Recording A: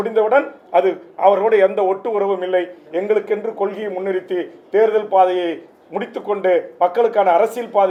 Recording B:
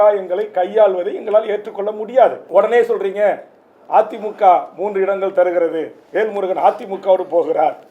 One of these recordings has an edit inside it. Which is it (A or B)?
B